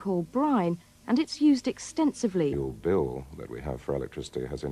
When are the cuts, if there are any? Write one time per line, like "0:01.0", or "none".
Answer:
none